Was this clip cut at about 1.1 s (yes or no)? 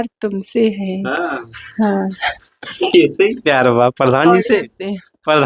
no